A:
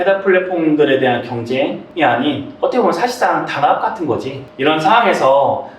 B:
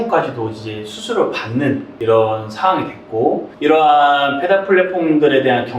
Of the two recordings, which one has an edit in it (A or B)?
B